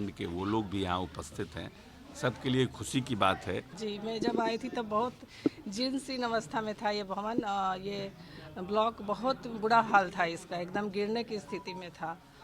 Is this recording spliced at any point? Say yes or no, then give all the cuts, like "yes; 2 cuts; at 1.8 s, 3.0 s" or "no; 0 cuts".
yes; 1 cut; at 3.9 s